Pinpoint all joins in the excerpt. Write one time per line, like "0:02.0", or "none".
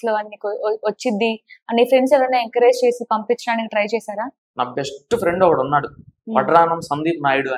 none

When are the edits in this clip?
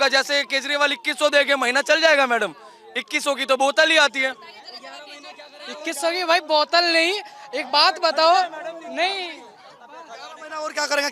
none

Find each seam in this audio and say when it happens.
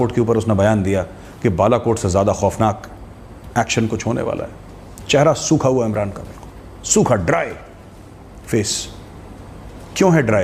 none

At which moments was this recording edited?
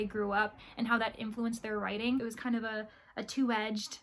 0:02.2

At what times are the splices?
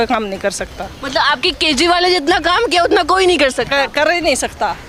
none

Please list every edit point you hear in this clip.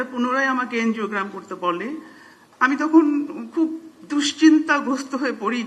none

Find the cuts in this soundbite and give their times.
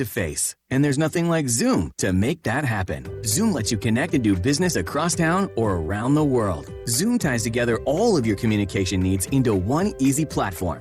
none

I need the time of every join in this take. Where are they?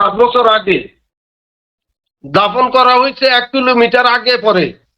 none

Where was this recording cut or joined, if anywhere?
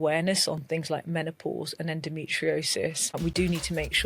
0:03.0

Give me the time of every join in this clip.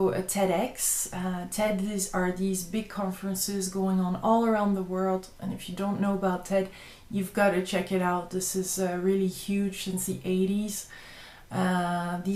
none

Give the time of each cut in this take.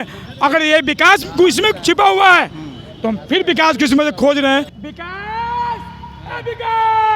0:04.8

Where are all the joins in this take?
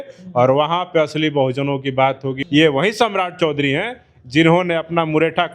0:02.4

